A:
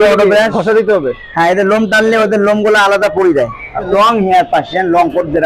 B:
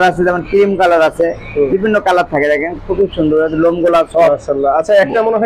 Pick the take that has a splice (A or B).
A